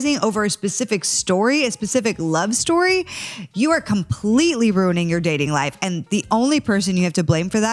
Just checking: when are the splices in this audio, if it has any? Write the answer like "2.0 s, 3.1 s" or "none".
none